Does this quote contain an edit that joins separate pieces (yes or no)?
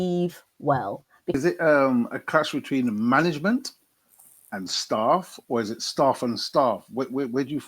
yes